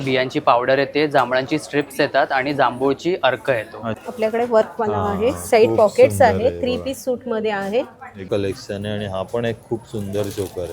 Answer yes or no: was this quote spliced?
yes